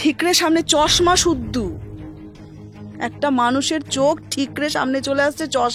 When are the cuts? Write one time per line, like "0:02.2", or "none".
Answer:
none